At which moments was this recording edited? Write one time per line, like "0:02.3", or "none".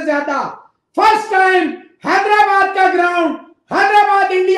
none